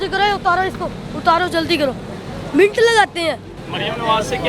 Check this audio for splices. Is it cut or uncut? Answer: cut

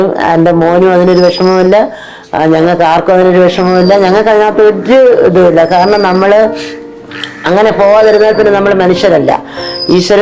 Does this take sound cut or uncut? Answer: uncut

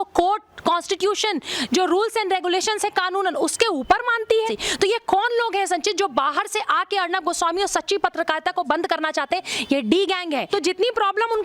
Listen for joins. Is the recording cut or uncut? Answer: cut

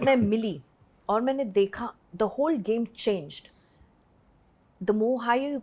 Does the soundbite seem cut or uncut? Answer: uncut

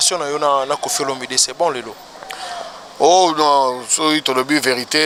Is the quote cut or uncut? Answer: uncut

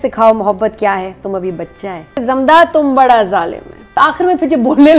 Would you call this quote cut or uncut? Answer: cut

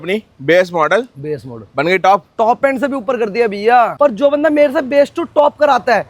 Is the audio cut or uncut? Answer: cut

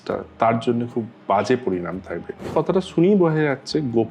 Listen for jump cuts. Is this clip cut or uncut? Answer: cut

